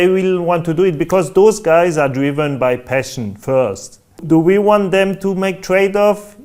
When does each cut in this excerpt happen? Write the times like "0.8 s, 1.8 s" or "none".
4.2 s